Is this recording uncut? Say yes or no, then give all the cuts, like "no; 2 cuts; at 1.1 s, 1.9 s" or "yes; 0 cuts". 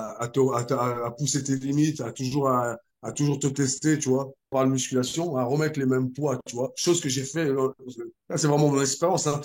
no; 1 cut; at 4.5 s